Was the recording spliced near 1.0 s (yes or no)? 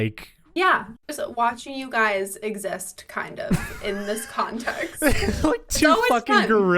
yes